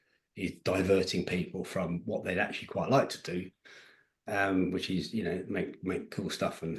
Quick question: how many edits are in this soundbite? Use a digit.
0